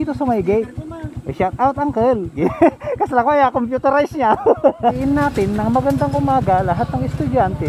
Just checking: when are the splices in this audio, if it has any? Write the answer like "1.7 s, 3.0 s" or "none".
5.0 s